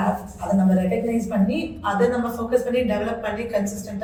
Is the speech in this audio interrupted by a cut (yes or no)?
no